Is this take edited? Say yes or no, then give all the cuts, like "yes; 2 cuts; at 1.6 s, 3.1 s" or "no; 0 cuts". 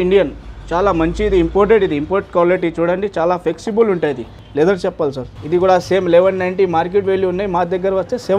yes; 2 cuts; at 4.4 s, 5.3 s